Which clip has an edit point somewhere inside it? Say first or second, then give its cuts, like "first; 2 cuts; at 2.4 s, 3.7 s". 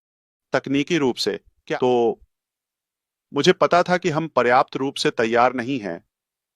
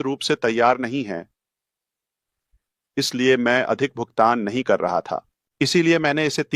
first; 1 cut; at 1.5 s